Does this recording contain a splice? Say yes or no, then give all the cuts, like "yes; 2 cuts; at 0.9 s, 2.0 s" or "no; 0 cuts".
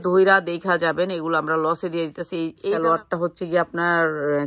yes; 1 cut; at 2.8 s